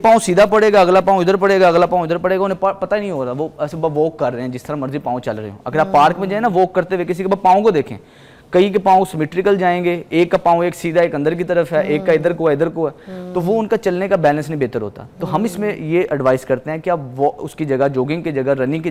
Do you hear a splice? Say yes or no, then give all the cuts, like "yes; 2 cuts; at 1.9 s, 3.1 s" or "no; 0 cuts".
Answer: no; 0 cuts